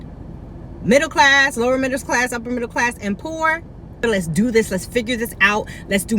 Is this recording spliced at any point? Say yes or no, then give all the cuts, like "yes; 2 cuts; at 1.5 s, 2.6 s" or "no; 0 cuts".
yes; 1 cut; at 4.0 s